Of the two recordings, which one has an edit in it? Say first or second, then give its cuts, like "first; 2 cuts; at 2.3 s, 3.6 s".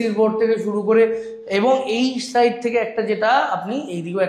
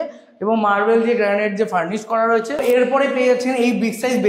second; 1 cut; at 2.6 s